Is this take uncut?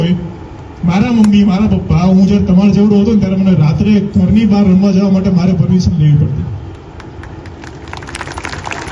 yes; 0 cuts

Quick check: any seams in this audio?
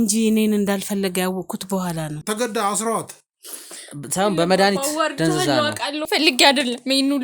yes; 2 cuts; at 2.2 s, 6.0 s

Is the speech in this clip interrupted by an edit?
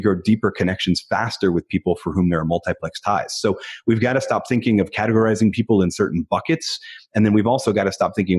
no; 0 cuts

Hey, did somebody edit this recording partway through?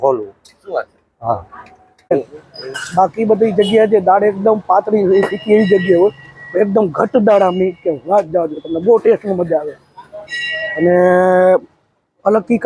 yes; 1 cut; at 2.1 s

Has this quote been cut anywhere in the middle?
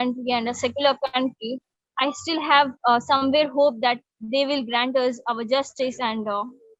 no; 0 cuts

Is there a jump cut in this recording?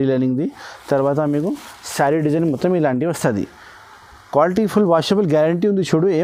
no; 0 cuts

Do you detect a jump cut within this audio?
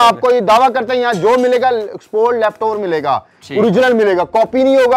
no; 0 cuts

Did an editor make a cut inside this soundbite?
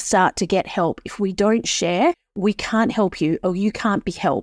yes; 1 cut; at 2.3 s

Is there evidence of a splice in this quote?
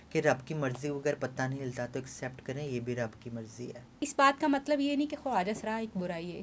yes; 1 cut; at 3.9 s

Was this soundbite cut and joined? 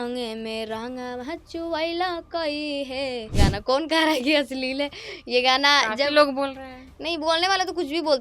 yes; 1 cut; at 3.4 s

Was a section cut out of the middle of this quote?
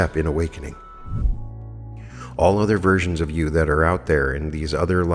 yes; 1 cut; at 1.2 s

